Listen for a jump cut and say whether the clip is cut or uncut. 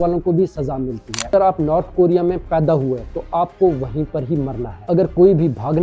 cut